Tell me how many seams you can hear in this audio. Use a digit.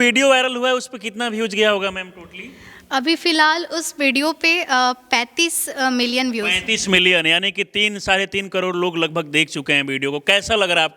0